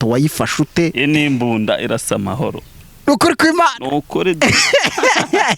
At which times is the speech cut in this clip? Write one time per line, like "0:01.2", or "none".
0:01.0